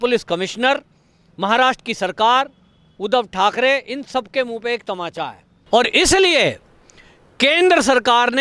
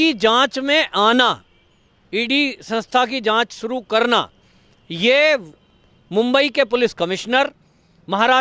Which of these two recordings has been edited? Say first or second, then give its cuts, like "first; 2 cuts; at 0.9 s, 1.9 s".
first; 1 cut; at 5.5 s